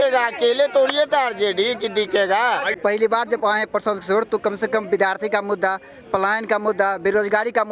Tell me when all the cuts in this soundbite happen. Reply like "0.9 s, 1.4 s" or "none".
2.8 s